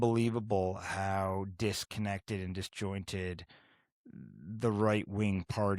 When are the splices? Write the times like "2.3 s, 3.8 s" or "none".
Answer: none